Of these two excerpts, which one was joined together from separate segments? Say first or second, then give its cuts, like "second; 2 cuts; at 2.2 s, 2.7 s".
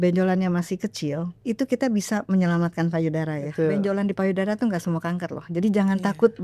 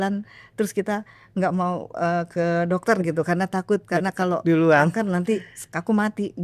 first; 2 cuts; at 1.3 s, 3.7 s